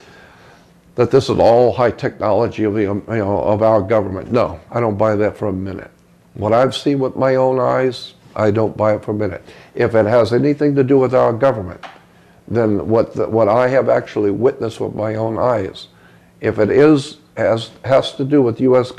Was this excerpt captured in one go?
yes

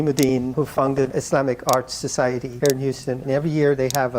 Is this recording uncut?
yes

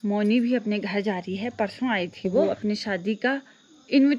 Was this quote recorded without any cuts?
no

